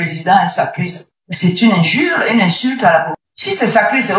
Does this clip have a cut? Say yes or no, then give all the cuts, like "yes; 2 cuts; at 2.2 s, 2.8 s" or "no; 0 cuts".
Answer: yes; 1 cut; at 3.2 s